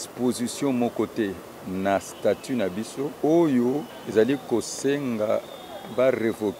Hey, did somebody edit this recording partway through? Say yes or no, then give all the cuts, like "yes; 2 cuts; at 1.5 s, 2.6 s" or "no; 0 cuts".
yes; 2 cuts; at 3.1 s, 3.9 s